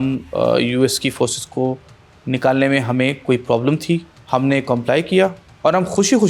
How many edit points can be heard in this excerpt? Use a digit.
1